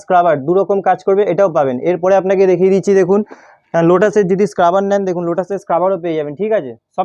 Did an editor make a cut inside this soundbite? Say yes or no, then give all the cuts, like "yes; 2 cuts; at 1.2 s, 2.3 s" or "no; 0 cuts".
no; 0 cuts